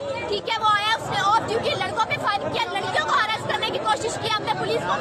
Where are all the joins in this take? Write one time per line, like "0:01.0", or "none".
none